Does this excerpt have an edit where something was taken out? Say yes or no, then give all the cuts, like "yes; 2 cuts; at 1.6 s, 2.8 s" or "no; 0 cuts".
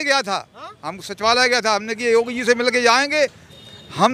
no; 0 cuts